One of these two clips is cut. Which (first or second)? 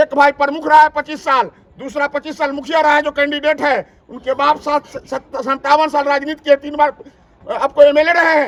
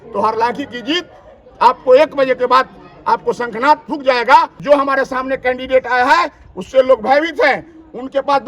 second